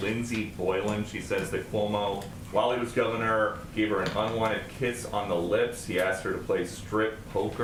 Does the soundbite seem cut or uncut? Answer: uncut